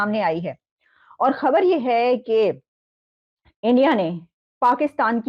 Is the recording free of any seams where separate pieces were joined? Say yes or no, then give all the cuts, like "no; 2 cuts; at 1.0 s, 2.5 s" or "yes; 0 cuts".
yes; 0 cuts